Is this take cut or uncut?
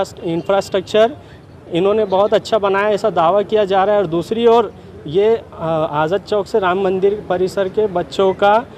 uncut